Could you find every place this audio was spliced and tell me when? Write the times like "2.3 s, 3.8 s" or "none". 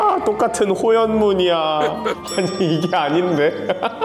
2.2 s